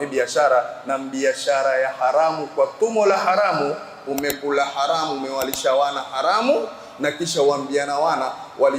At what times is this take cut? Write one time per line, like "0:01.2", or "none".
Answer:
none